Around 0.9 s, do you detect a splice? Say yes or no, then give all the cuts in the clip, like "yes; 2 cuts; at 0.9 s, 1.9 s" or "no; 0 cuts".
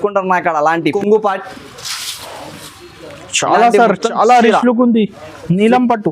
yes; 1 cut; at 0.9 s